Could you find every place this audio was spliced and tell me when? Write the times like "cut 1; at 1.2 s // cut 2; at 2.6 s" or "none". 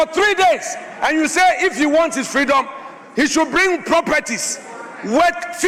none